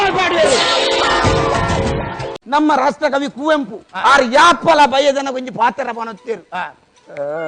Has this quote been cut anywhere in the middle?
yes; 1 cut; at 2.4 s

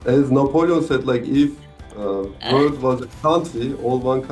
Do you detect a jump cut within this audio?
no; 0 cuts

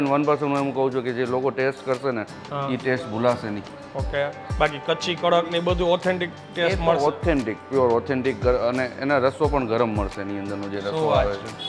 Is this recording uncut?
yes; 0 cuts

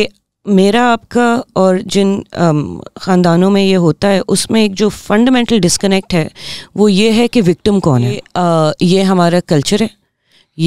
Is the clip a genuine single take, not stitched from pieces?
no; 1 cut; at 8.2 s

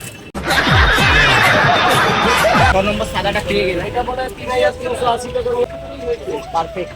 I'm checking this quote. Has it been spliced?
yes; 2 cuts; at 2.7 s, 5.6 s

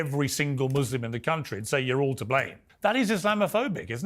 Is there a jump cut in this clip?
yes; 1 cut; at 2.7 s

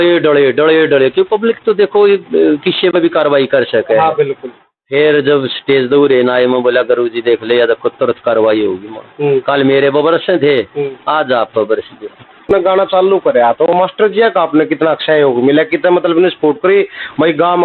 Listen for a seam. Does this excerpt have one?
yes; 1 cut; at 12.5 s

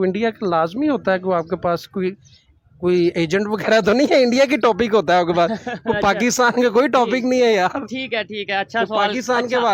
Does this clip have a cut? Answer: no; 0 cuts

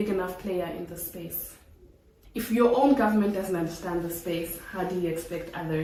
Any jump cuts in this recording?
no; 0 cuts

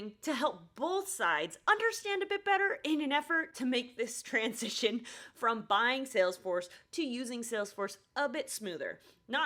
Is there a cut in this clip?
no; 0 cuts

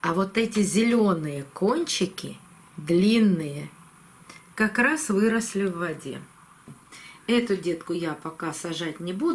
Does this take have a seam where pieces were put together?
yes; 1 cut; at 6.7 s

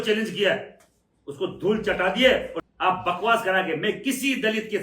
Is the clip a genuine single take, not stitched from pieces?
no; 1 cut; at 2.6 s

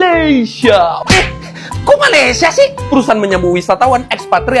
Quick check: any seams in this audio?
no; 0 cuts

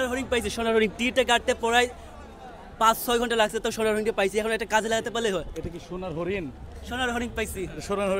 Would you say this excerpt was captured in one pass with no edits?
yes; 0 cuts

